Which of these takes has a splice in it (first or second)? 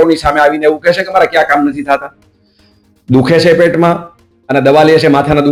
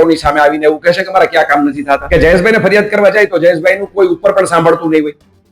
second